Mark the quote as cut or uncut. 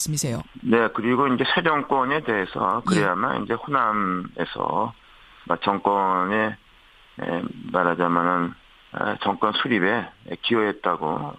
uncut